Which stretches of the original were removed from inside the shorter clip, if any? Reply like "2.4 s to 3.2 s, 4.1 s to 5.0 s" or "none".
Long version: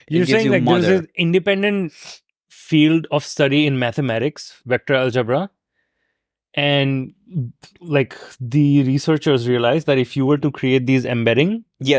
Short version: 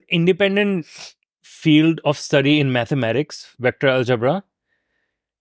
none